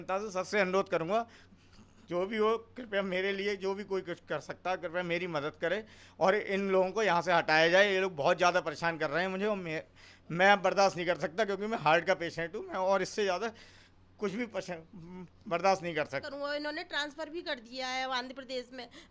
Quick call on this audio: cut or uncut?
cut